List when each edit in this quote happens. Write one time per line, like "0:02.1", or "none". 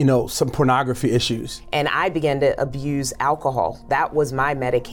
0:01.5